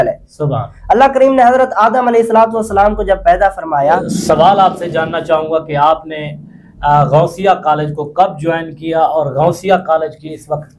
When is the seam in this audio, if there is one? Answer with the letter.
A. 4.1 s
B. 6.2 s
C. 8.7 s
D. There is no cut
A